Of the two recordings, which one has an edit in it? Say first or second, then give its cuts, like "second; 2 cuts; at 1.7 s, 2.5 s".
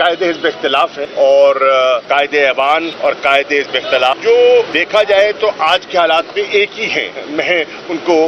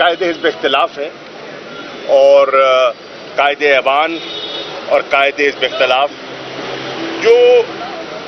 first; 6 cuts; at 1.0 s, 2.0 s, 2.9 s, 4.1 s, 4.8 s, 7.1 s